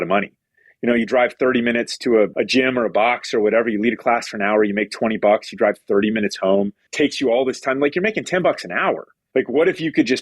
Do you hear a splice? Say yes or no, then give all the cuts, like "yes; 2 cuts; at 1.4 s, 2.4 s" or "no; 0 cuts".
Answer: yes; 3 cuts; at 2.3 s, 6.9 s, 9.1 s